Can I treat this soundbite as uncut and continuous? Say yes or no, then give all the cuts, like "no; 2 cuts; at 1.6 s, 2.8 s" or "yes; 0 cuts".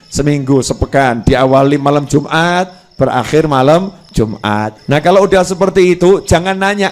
no; 1 cut; at 4.8 s